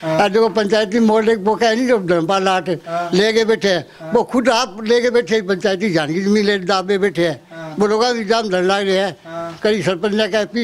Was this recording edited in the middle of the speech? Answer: no; 0 cuts

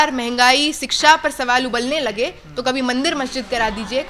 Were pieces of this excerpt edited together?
no; 0 cuts

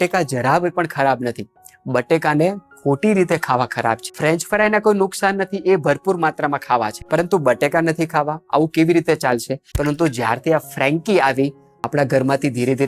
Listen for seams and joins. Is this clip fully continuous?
no; 3 cuts; at 4.1 s, 7.0 s, 9.6 s

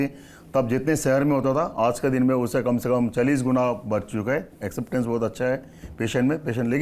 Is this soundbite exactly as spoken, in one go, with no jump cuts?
yes; 0 cuts

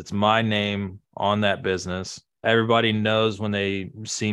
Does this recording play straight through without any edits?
no; 1 cut; at 2.4 s

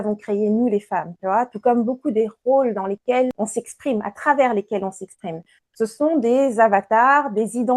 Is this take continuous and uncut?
no; 1 cut; at 3.3 s

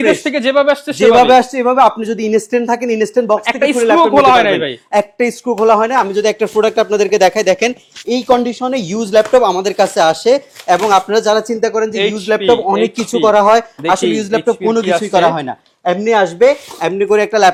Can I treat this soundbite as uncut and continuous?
yes; 0 cuts

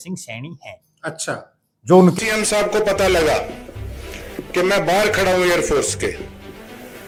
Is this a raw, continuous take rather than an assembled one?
yes; 0 cuts

